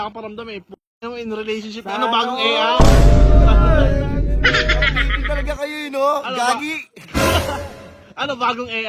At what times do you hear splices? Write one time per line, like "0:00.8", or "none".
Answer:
none